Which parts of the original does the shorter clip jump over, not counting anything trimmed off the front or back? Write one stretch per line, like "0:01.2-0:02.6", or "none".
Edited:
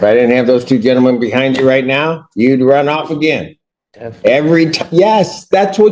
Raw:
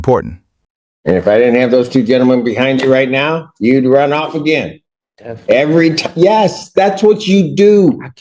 none